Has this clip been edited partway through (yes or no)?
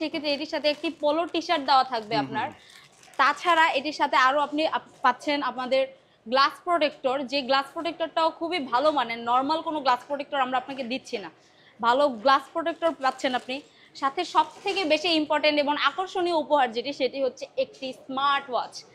no